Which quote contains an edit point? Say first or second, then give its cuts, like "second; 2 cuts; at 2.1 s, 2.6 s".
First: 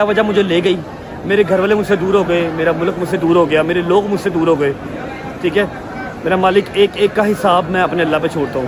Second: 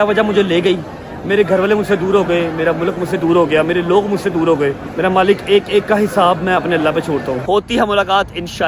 second; 2 cuts; at 4.9 s, 7.4 s